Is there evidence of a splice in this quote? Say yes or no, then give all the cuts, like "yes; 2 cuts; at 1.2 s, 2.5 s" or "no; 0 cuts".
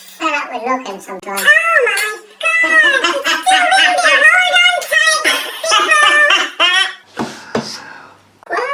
no; 0 cuts